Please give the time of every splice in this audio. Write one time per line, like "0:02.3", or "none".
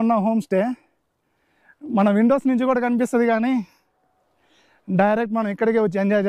none